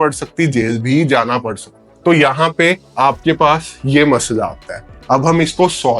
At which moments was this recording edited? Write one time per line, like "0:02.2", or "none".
none